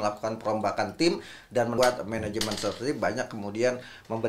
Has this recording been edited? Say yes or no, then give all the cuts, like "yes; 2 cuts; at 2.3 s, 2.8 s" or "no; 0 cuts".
yes; 1 cut; at 1.8 s